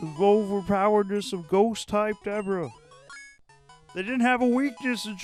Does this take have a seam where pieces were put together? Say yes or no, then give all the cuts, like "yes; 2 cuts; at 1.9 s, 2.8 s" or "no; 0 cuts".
no; 0 cuts